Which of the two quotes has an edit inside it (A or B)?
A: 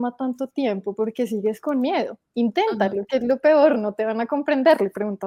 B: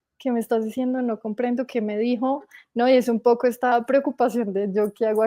B